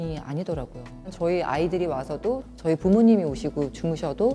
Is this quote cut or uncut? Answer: cut